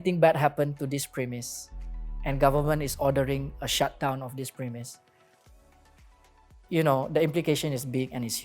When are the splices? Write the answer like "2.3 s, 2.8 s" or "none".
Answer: none